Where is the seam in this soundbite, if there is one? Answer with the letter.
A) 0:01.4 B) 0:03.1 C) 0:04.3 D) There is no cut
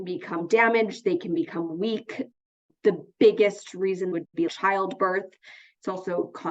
C